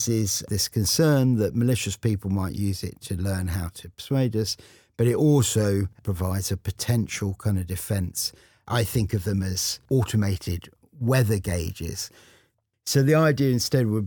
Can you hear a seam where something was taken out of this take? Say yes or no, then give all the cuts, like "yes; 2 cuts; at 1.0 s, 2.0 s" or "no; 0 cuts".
yes; 4 cuts; at 6.0 s, 8.7 s, 9.7 s, 12.5 s